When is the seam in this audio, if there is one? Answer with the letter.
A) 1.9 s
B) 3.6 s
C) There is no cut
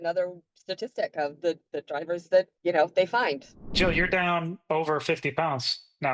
B